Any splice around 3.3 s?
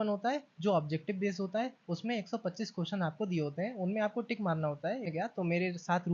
no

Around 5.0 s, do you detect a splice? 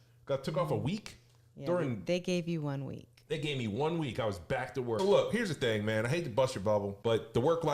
yes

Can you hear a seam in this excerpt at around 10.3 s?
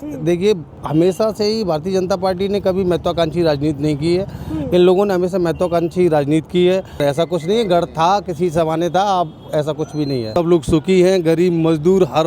yes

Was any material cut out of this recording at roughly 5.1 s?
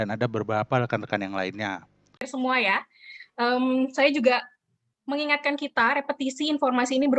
no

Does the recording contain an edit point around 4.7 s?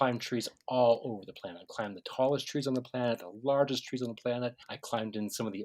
yes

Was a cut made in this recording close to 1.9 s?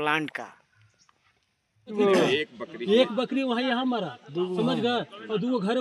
yes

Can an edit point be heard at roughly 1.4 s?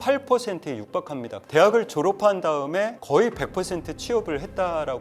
yes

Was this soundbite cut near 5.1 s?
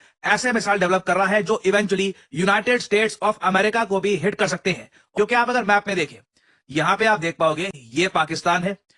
yes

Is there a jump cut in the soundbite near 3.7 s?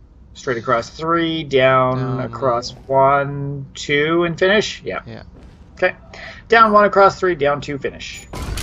no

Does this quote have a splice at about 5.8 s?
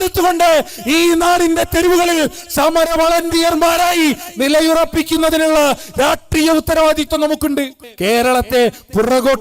no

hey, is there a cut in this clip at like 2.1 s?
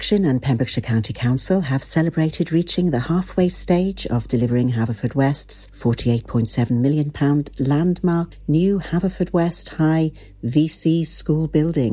yes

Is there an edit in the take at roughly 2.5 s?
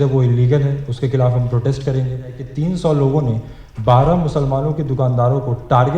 yes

